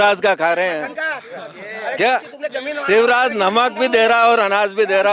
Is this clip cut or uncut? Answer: uncut